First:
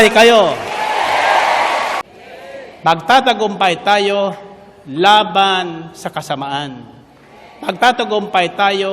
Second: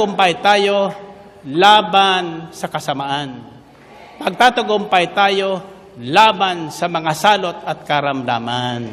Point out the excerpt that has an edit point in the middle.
first; 1 cut; at 2.1 s

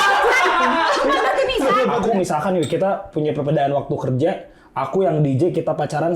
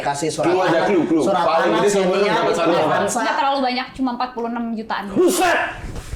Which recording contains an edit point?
first; 1 cut; at 1.8 s

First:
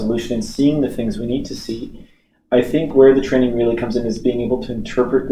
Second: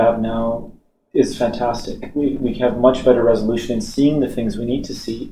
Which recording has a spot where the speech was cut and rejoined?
first; 1 cut; at 2.9 s

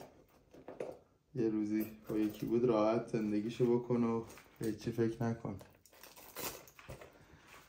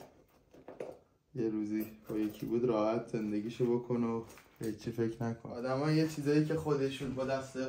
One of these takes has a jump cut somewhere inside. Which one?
second; 1 cut; at 5.5 s

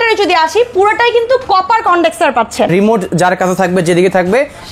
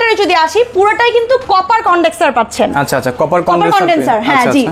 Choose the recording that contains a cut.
first; 1 cut; at 2.7 s

